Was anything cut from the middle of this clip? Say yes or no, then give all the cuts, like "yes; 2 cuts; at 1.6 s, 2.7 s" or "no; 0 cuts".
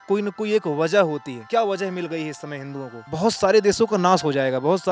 yes; 2 cuts; at 1.4 s, 3.0 s